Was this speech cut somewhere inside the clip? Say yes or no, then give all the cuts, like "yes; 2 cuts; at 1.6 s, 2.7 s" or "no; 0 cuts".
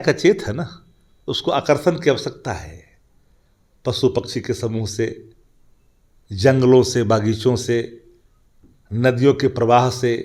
no; 0 cuts